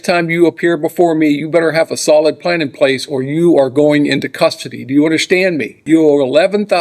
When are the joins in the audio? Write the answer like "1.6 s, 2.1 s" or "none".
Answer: 5.8 s